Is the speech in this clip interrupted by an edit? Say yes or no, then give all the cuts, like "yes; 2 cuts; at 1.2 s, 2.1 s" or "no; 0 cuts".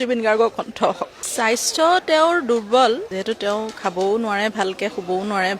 no; 0 cuts